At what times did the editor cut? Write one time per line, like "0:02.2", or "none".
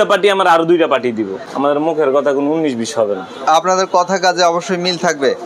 0:01.4